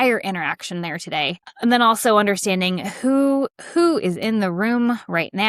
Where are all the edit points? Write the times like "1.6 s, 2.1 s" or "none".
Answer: none